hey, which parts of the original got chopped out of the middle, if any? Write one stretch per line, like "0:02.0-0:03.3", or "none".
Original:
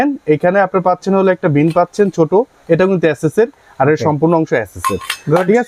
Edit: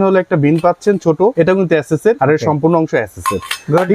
0:02.5-0:02.7
0:03.5-0:03.8